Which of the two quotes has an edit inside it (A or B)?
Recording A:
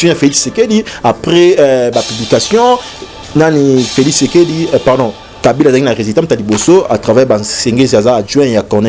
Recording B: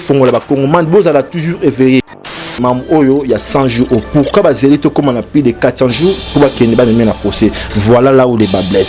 B